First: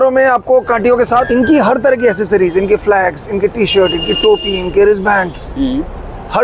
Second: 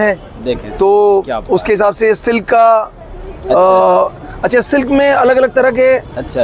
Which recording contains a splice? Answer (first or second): first